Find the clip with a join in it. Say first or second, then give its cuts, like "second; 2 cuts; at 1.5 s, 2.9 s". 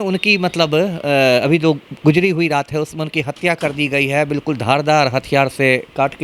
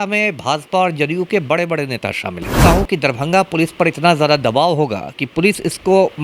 second; 1 cut; at 2.6 s